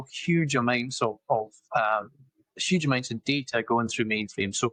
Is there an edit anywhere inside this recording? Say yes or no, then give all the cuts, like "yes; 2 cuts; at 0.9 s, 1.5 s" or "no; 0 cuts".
no; 0 cuts